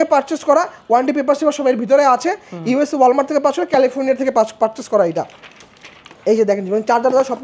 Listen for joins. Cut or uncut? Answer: uncut